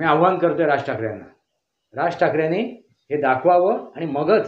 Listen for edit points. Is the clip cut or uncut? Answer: uncut